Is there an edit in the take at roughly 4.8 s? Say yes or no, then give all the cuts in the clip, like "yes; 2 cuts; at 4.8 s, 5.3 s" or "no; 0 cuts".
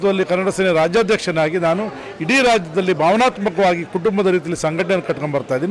no; 0 cuts